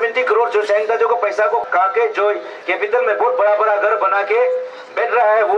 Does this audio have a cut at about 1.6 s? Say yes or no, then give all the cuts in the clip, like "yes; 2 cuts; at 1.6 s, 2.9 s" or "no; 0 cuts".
yes; 1 cut; at 1.6 s